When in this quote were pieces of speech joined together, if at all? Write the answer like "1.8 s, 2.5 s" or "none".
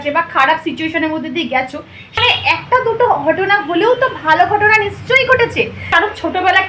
2.2 s, 5.9 s